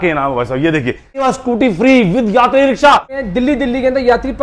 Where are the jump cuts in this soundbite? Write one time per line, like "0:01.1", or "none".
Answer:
0:01.2
0:03.2